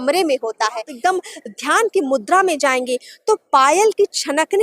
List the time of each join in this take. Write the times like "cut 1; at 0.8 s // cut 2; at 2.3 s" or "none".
cut 1; at 0.9 s